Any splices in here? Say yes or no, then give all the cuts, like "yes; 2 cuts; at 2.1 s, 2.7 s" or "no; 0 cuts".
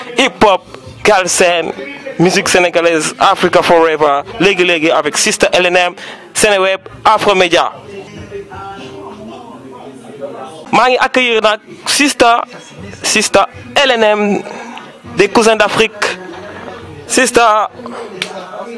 no; 0 cuts